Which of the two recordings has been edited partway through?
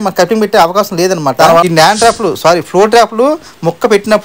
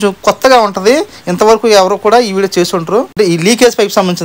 first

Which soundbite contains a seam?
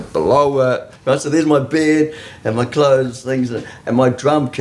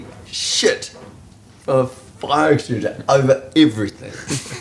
first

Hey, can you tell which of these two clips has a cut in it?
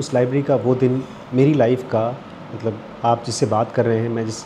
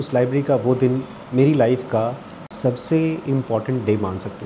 second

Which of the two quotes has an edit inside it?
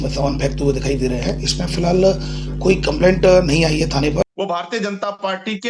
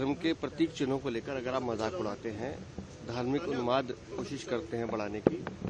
first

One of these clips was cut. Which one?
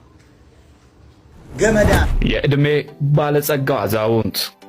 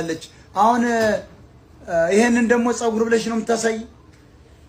first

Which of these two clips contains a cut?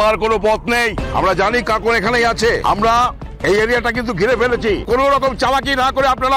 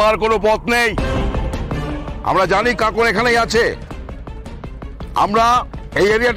first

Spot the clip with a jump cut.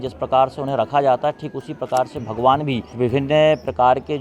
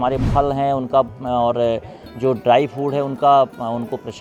first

